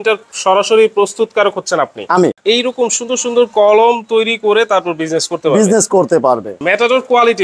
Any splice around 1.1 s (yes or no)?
no